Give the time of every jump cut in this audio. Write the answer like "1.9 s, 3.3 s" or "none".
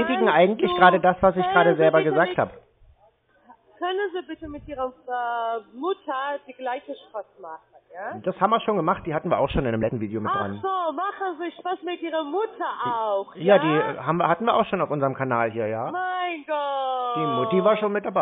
none